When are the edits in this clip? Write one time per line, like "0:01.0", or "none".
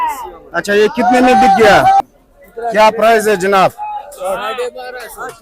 0:02.0